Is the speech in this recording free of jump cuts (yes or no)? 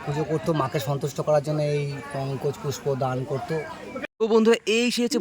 no